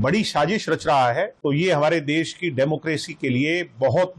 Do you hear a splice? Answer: yes; 1 cut; at 1.3 s

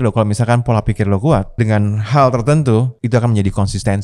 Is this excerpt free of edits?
no; 2 cuts; at 1.6 s, 2.9 s

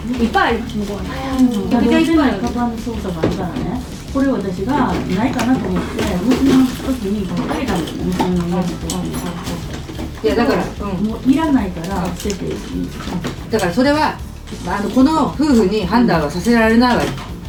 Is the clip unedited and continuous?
yes; 0 cuts

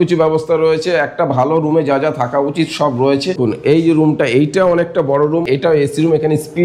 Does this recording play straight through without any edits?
no; 2 cuts; at 3.4 s, 5.5 s

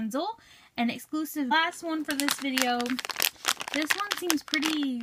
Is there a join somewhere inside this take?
no; 0 cuts

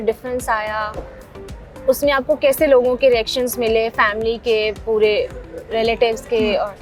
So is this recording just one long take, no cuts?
yes; 0 cuts

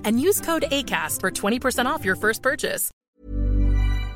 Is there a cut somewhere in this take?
yes; 1 cut; at 2.9 s

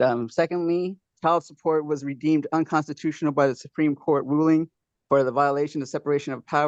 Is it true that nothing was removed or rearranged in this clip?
no; 1 cut; at 1.1 s

